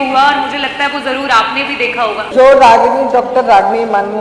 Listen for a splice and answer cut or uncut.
cut